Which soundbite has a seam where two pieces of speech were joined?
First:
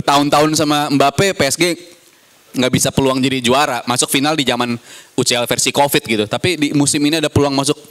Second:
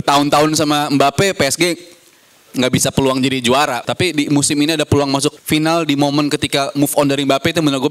second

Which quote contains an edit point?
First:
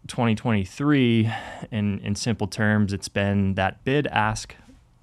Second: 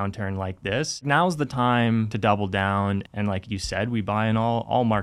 second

